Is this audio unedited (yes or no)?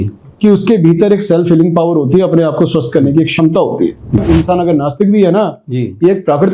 no